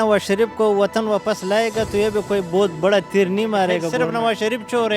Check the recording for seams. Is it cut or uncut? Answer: cut